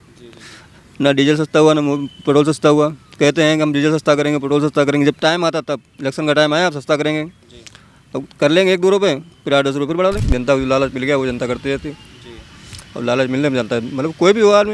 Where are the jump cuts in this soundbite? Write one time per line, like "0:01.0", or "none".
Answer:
0:10.2